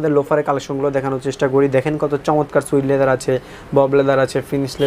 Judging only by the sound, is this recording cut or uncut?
uncut